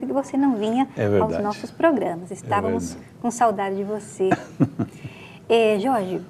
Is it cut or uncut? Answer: cut